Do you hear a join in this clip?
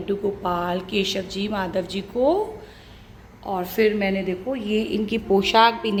no; 0 cuts

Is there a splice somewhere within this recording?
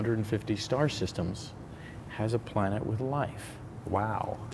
no; 0 cuts

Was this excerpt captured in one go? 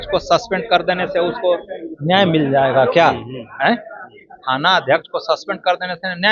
yes; 0 cuts

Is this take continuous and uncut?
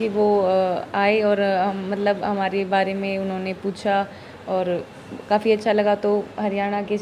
yes; 0 cuts

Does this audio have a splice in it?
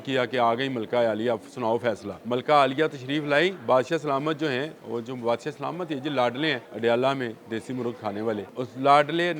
yes; 3 cuts; at 2.1 s, 6.7 s, 8.5 s

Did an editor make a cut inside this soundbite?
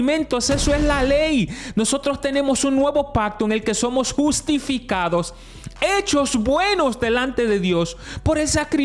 no; 0 cuts

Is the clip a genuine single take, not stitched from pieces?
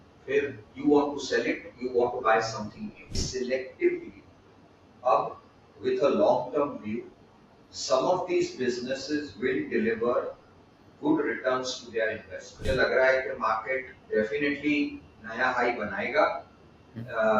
no; 2 cuts; at 3.2 s, 12.5 s

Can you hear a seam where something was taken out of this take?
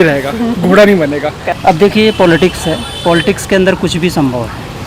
yes; 1 cut; at 1.5 s

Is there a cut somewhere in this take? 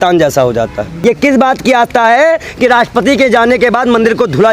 yes; 1 cut; at 0.9 s

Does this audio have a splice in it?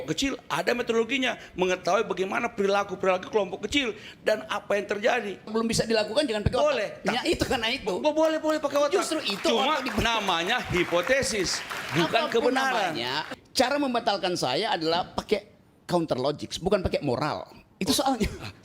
yes; 2 cuts; at 5.5 s, 13.4 s

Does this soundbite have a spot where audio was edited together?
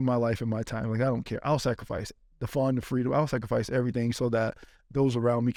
no; 0 cuts

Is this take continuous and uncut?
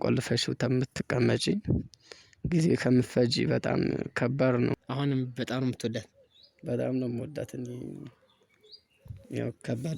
no; 1 cut; at 4.7 s

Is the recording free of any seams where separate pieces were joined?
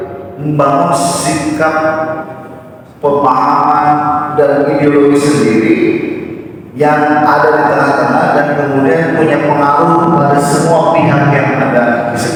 yes; 0 cuts

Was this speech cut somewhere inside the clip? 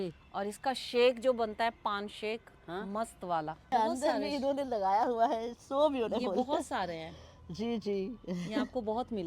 yes; 1 cut; at 3.7 s

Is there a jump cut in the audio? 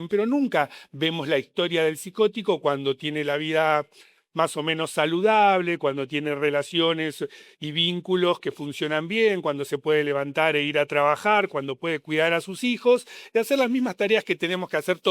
no; 0 cuts

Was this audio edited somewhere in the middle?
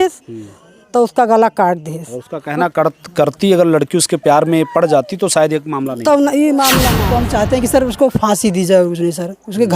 yes; 1 cut; at 7.0 s

